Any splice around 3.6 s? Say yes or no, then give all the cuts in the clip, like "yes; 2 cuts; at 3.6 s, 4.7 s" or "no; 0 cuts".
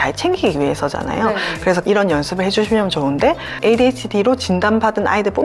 yes; 2 cuts; at 1.8 s, 3.6 s